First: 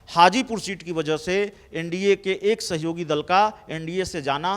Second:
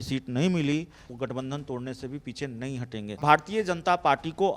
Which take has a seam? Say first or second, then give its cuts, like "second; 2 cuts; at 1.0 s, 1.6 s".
second; 2 cuts; at 1.0 s, 3.2 s